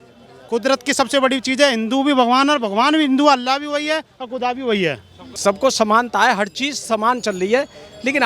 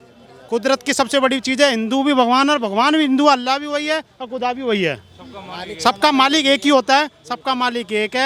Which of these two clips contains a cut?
first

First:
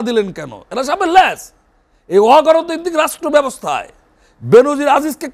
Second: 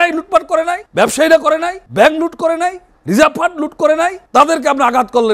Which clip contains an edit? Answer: second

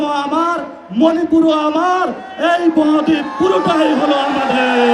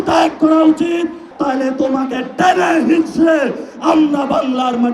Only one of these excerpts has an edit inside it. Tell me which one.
second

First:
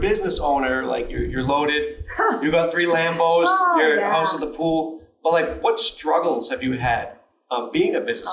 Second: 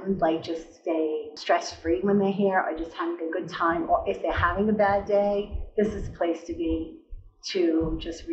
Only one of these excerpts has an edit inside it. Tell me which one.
second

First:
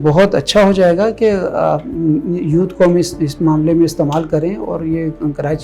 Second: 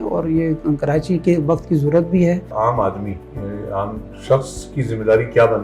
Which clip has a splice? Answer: second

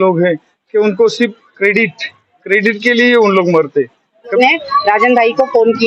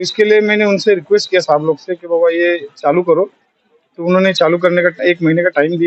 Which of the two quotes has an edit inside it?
first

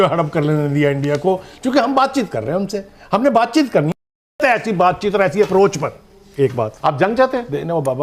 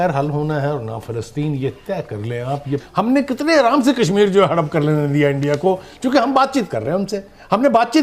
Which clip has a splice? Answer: second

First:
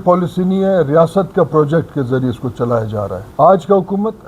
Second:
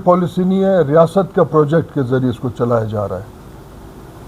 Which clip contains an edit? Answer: first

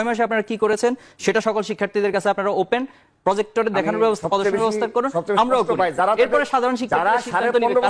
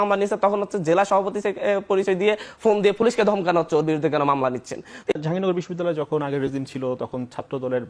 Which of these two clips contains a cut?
second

